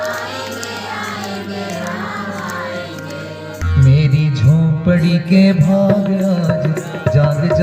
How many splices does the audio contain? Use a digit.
1